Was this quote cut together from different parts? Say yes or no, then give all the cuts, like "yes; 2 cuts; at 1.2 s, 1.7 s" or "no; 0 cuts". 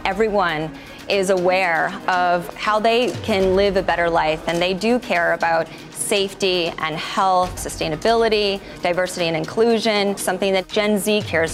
yes; 3 cuts; at 2.5 s, 7.7 s, 10.5 s